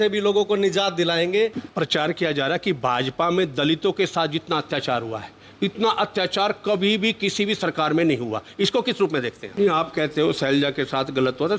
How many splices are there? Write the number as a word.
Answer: two